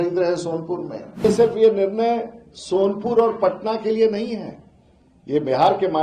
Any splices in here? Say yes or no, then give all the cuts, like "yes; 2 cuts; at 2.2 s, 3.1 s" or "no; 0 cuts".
yes; 1 cut; at 1.2 s